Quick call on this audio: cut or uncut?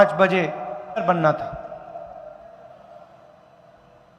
cut